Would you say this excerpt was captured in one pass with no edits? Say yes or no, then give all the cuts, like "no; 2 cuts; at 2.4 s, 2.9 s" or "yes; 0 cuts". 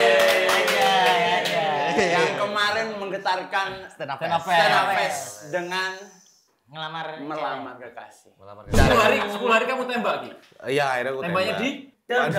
no; 1 cut; at 8.7 s